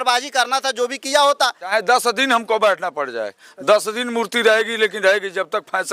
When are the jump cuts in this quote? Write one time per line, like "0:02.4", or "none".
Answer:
0:01.7